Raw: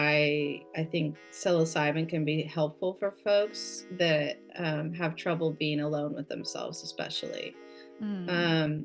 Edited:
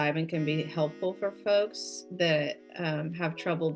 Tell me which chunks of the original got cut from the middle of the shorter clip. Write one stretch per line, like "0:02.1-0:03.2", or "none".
none

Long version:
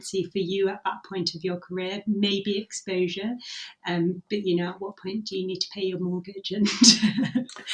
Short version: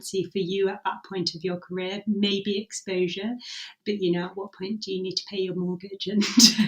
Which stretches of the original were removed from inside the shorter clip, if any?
0:03.8-0:04.2

